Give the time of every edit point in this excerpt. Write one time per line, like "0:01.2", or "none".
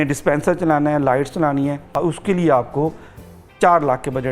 0:01.9